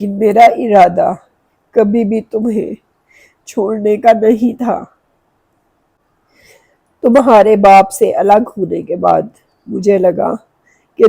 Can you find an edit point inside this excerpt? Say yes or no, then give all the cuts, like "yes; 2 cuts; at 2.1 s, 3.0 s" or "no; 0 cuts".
yes; 1 cut; at 6.0 s